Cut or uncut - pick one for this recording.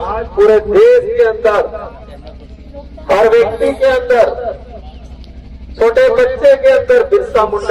uncut